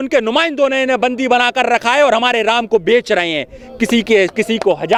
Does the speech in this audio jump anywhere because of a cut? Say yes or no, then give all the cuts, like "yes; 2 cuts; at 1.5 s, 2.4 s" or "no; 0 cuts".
no; 0 cuts